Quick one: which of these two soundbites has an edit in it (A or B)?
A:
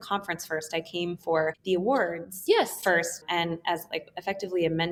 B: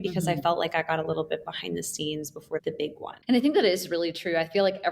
B